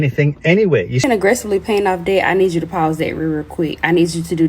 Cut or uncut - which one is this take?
cut